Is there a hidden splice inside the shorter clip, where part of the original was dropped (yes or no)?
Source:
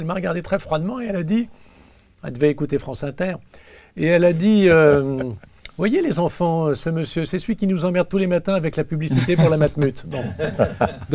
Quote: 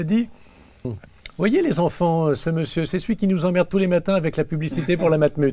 yes